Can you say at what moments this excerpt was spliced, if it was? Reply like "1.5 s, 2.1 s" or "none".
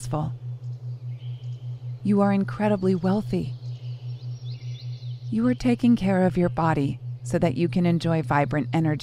none